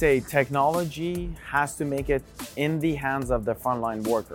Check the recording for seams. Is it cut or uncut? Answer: uncut